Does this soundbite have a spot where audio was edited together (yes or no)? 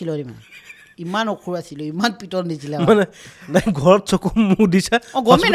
no